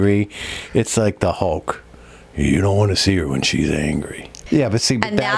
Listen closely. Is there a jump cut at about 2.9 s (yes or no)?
no